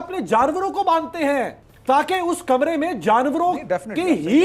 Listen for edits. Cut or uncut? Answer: cut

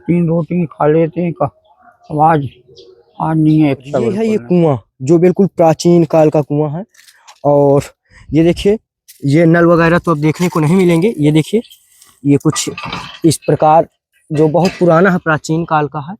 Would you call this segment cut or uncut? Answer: cut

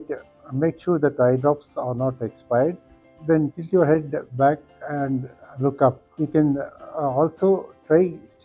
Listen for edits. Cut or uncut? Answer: uncut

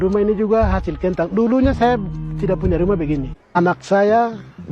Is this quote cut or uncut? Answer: cut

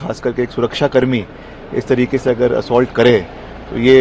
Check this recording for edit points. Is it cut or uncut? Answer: uncut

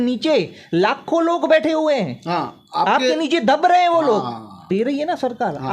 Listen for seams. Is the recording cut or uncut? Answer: cut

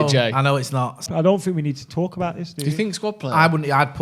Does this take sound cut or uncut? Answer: cut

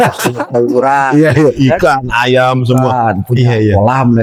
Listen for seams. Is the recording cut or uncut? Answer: uncut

